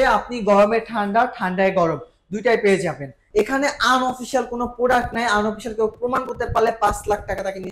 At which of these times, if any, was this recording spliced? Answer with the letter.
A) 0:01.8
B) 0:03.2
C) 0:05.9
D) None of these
B